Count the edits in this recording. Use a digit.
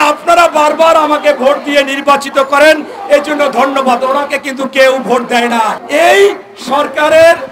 1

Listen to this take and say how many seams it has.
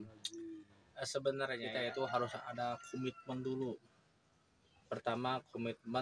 1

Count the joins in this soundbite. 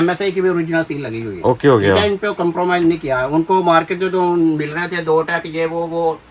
0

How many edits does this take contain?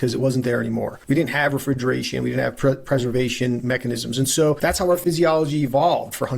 2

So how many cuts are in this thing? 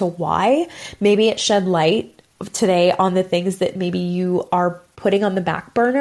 1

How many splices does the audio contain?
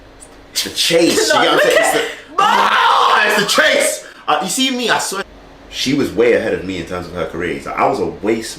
1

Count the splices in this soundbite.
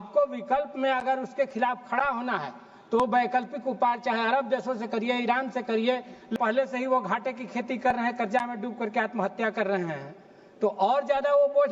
1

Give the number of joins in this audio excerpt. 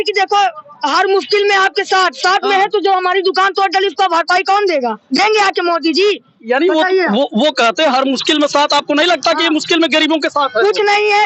0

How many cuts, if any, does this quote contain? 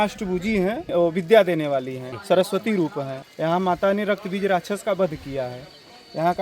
3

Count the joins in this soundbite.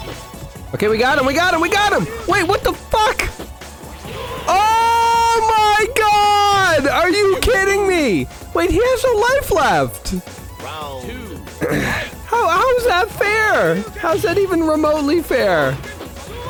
0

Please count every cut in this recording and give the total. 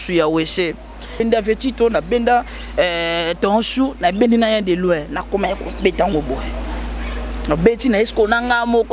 1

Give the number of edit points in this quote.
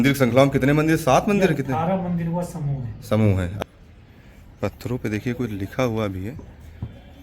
1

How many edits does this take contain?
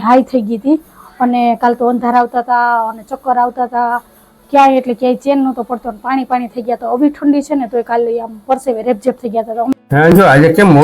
1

